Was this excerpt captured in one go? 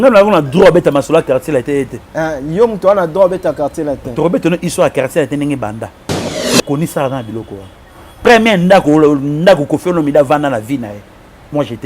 no; 1 cut; at 6.1 s

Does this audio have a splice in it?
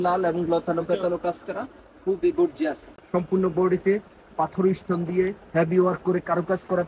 yes; 1 cut; at 2.9 s

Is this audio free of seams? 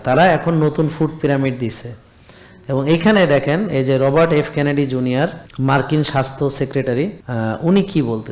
no; 2 cuts; at 5.4 s, 7.2 s

